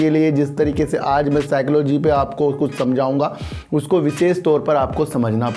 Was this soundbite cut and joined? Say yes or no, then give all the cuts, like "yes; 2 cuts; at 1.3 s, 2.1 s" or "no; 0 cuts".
no; 0 cuts